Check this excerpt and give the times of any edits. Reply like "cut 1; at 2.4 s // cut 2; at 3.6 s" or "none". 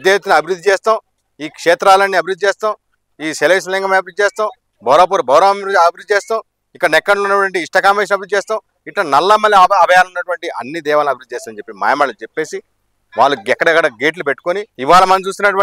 cut 1; at 14.7 s